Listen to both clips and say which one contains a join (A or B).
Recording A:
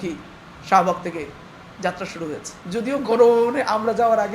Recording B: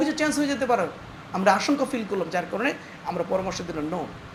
A